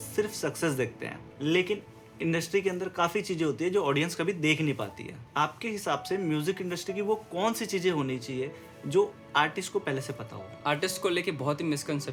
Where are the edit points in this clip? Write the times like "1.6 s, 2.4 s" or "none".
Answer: none

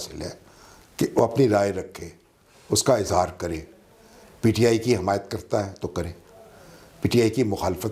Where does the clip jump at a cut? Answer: none

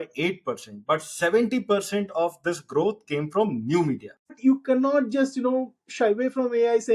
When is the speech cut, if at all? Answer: 4.3 s

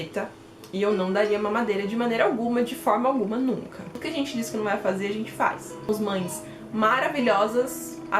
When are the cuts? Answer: 4.0 s, 5.9 s

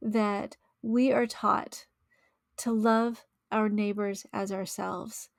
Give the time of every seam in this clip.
none

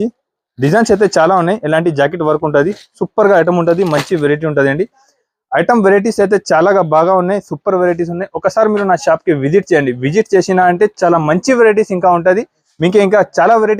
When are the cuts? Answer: none

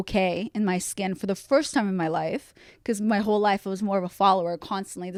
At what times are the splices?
none

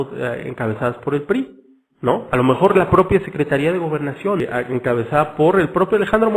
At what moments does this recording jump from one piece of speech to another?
4.4 s

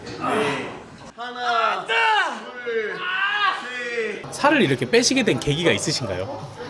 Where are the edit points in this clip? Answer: 1.1 s, 4.3 s

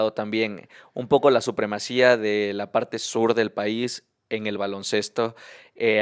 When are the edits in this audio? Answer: none

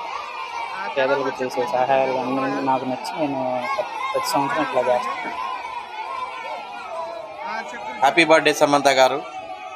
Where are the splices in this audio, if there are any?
5.0 s, 8.0 s

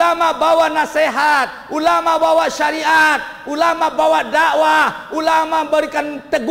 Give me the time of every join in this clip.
none

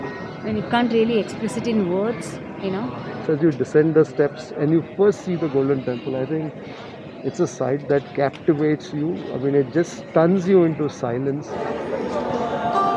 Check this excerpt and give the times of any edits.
3.1 s

